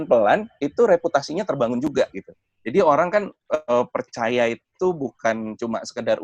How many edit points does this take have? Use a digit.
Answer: 0